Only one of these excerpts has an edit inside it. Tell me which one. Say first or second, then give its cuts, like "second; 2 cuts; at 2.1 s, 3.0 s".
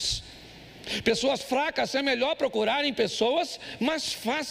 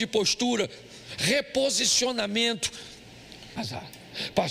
second; 1 cut; at 3.6 s